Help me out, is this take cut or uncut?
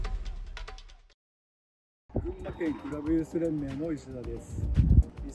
uncut